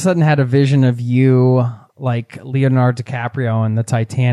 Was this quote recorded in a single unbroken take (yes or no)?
yes